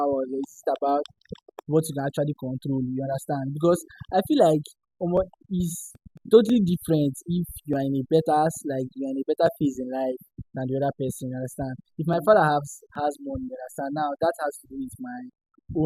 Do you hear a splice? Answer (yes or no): no